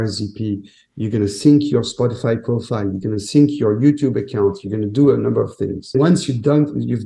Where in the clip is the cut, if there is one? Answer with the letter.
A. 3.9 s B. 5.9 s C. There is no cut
B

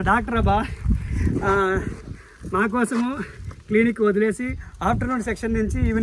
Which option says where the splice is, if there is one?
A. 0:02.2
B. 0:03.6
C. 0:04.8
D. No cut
D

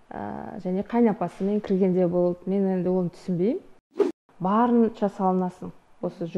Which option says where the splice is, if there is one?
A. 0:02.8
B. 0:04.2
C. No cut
B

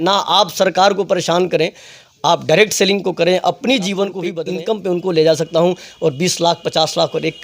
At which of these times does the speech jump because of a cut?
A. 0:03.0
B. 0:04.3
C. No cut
B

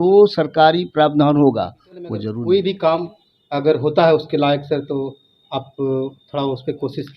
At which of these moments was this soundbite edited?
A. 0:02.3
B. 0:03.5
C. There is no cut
A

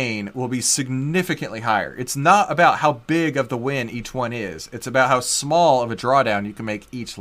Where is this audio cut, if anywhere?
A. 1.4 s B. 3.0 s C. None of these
C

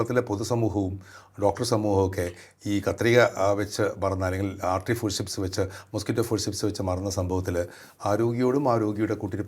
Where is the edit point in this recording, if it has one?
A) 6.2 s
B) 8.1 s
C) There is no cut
C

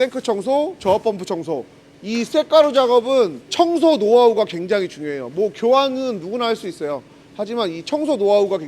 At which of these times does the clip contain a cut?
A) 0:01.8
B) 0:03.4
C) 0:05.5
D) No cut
A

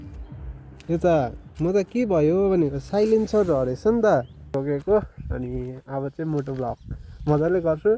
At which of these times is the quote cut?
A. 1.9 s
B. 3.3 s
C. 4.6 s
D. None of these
C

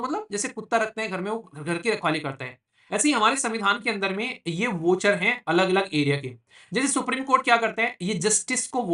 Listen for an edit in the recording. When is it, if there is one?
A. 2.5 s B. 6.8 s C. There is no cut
C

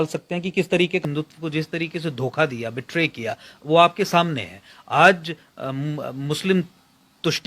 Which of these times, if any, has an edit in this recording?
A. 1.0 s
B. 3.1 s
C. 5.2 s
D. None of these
A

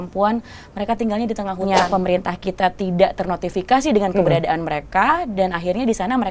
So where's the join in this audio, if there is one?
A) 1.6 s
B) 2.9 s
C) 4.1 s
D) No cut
A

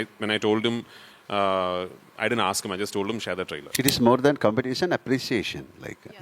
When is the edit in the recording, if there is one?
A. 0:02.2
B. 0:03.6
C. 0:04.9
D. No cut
B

